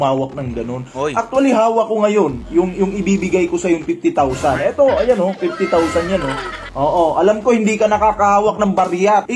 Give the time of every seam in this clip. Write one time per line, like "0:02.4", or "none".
0:06.7